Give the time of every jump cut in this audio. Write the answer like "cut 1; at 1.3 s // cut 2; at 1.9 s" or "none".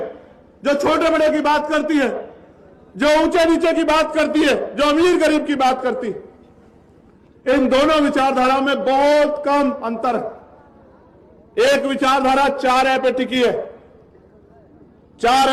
none